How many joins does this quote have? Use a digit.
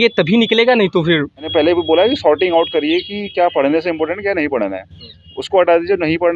1